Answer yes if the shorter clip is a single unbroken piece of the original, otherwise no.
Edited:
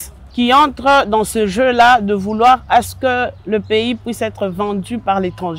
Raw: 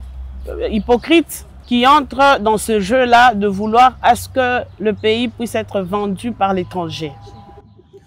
yes